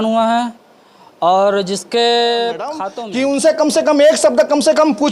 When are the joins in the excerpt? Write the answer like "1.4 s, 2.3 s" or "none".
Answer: 2.9 s